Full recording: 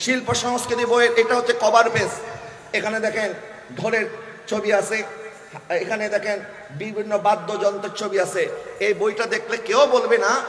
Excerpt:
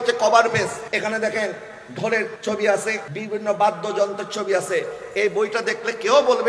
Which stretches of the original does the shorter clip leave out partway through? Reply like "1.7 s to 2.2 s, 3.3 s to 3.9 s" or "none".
2.2 s to 2.6 s, 4.2 s to 4.4 s, 5.2 s to 6.8 s